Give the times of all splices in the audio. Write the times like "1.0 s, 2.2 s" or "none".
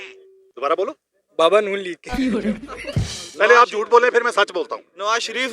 2.0 s, 2.8 s